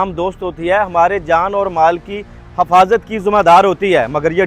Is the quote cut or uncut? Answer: uncut